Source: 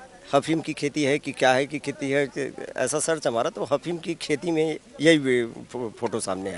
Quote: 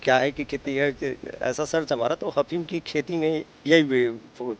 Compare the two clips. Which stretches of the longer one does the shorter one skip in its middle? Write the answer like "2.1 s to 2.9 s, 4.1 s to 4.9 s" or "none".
none